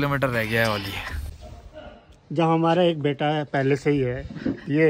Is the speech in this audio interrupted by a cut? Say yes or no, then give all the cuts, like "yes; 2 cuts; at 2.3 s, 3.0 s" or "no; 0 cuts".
yes; 1 cut; at 1.1 s